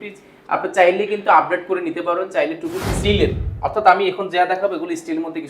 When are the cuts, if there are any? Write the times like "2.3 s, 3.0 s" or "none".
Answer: 2.9 s

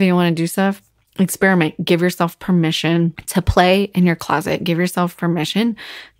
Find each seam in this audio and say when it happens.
3.2 s

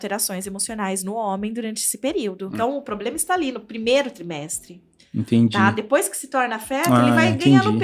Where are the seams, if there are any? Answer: 2.5 s

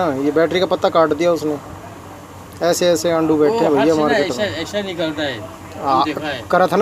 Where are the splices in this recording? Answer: none

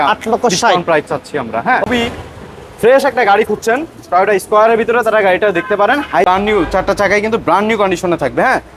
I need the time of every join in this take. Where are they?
1.9 s, 6.2 s

